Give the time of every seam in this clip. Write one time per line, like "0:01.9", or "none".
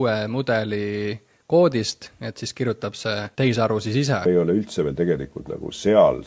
0:03.3
0:04.2